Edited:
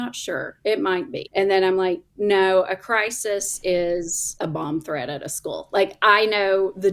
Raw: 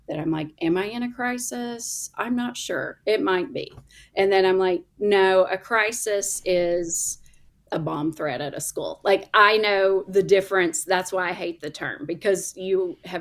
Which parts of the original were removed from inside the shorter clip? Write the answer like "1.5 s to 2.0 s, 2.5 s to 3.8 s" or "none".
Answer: 3.6 s to 4.0 s, 7.0 s to 7.5 s